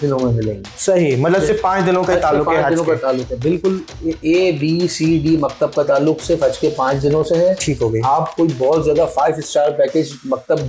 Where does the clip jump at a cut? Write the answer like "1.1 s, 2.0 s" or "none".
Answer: none